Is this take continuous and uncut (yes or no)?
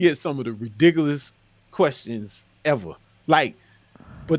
yes